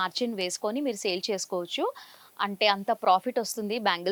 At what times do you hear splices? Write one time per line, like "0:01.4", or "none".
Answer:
none